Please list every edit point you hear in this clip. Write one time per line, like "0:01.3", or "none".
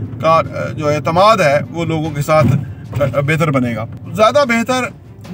0:04.0